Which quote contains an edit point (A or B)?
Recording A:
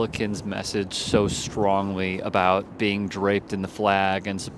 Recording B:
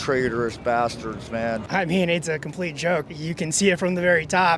B